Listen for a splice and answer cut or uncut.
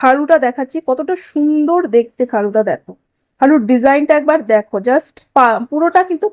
uncut